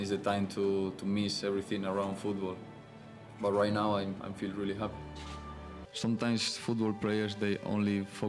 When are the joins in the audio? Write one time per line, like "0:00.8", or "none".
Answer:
0:05.8